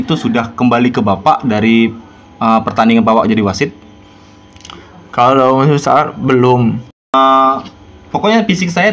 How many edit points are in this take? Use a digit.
1